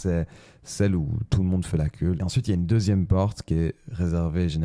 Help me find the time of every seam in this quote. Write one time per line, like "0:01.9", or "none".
0:02.2